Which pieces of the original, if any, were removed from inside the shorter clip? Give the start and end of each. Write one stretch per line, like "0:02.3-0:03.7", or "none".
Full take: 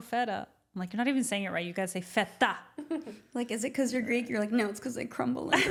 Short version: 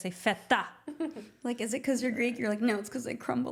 none